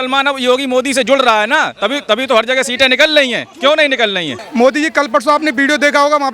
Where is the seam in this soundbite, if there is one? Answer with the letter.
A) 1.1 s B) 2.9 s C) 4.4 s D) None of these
C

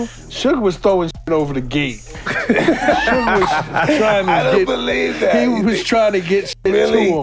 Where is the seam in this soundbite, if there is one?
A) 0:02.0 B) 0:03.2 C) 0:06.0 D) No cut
D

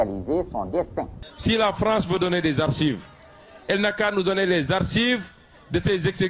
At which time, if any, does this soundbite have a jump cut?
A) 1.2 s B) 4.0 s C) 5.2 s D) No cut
A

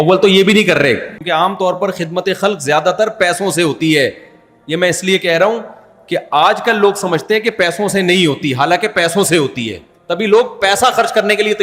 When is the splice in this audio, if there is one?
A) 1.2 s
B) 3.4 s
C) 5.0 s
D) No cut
A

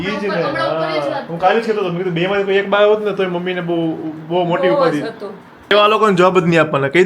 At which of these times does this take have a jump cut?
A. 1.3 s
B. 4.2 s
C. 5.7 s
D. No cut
C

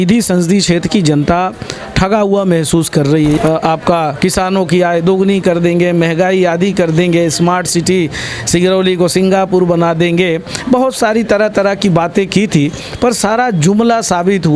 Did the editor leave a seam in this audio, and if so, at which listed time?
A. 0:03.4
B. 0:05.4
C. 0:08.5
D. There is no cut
A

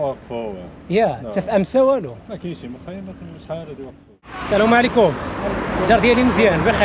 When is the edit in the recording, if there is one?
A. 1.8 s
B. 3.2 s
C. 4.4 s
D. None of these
C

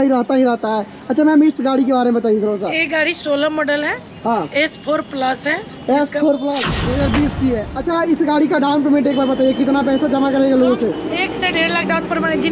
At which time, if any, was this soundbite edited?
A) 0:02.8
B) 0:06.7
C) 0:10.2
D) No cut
B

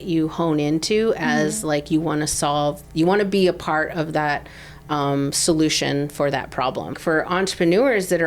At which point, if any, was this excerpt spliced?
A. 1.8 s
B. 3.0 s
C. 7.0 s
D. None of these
C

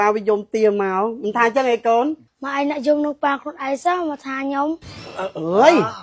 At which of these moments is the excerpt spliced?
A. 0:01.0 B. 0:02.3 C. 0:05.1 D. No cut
C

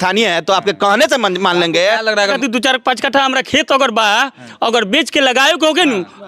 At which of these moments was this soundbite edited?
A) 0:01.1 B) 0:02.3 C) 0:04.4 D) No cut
B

